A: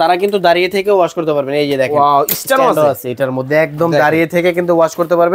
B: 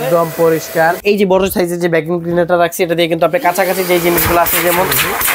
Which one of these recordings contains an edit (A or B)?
B